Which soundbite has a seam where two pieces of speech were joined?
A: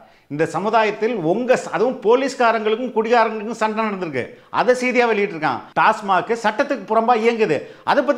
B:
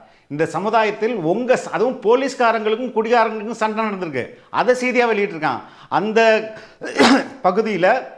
A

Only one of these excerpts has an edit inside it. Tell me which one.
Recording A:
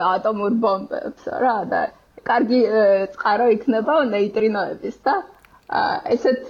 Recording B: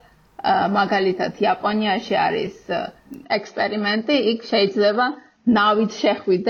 B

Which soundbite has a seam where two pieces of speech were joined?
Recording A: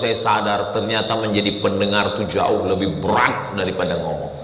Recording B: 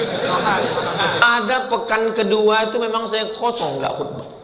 B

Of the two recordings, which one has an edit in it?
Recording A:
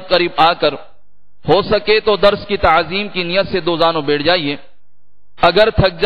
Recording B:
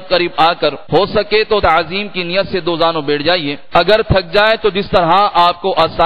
B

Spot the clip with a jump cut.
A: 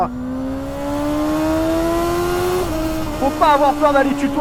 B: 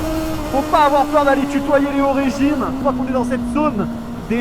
B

